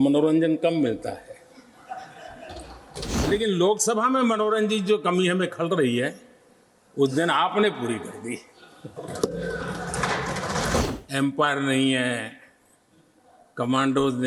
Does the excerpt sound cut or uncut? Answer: cut